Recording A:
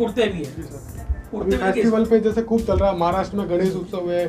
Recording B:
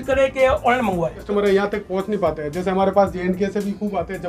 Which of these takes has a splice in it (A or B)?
B